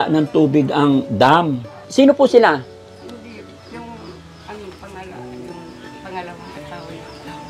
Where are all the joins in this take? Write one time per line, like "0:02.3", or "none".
0:01.8